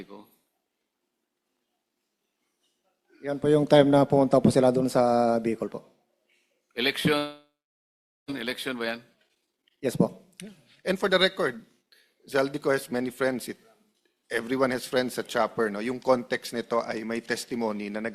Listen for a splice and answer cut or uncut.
uncut